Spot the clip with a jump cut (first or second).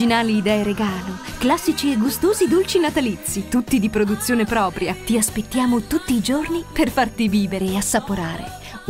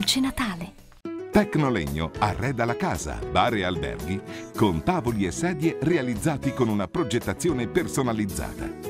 second